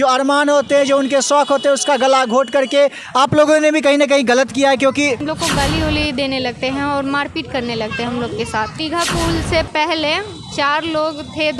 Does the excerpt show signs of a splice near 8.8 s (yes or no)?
yes